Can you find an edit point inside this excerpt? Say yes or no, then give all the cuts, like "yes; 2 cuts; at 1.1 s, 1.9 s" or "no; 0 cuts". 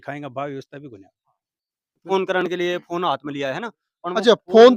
yes; 1 cut; at 2.2 s